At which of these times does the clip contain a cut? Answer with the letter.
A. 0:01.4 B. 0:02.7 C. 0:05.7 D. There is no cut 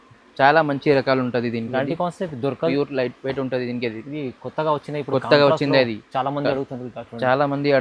B